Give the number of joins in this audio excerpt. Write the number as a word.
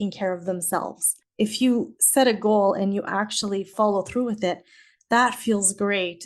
two